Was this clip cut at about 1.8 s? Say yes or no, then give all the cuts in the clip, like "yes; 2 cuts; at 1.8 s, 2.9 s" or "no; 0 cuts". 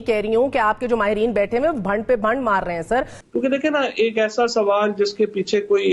no; 1 cut; at 3.2 s